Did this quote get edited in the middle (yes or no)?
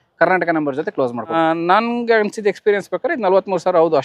yes